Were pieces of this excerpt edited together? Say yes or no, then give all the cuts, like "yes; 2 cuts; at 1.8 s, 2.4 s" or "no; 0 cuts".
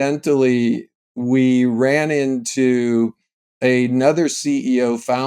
no; 0 cuts